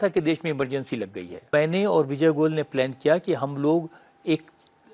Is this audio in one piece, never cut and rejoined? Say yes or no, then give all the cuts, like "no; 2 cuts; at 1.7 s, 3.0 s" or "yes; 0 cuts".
no; 1 cut; at 1.5 s